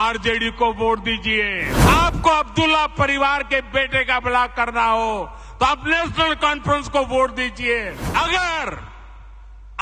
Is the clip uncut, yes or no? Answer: no